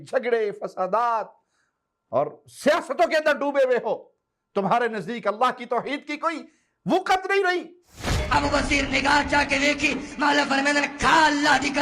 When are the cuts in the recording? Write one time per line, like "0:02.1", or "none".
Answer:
0:08.2